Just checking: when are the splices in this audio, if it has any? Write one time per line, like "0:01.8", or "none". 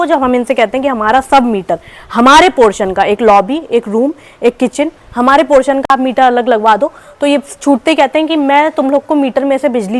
none